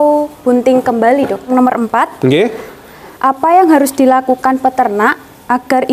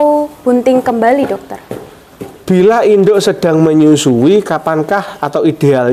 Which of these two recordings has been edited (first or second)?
first